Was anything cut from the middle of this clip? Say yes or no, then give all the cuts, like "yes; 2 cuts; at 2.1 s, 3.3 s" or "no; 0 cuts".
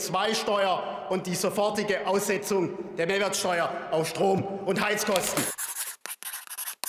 yes; 1 cut; at 5.5 s